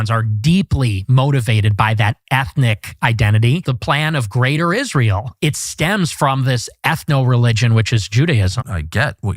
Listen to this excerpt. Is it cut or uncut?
cut